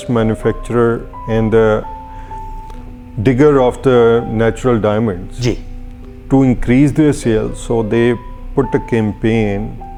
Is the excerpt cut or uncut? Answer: uncut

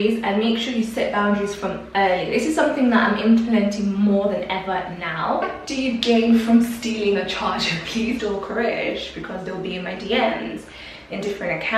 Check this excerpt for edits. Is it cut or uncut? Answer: cut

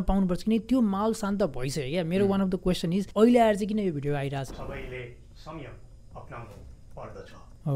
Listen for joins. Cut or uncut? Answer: cut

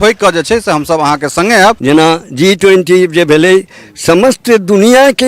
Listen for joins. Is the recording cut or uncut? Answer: cut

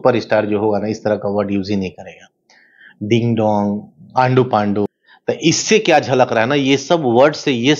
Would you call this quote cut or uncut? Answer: cut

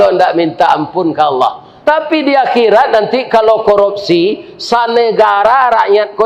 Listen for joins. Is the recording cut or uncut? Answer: cut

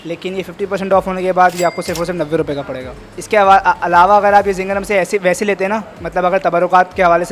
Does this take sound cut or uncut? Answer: uncut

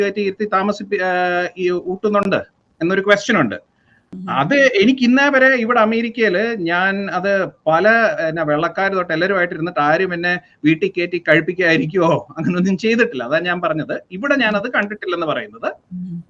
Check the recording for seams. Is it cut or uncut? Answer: uncut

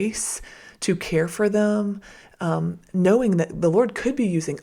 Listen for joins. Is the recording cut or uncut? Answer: uncut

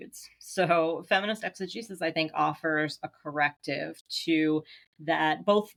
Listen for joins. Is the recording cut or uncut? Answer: uncut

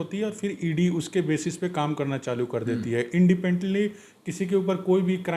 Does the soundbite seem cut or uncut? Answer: uncut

